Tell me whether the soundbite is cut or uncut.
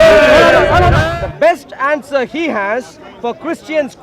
cut